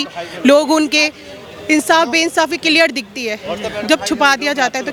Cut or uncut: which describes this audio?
uncut